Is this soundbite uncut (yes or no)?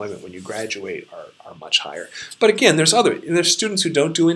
yes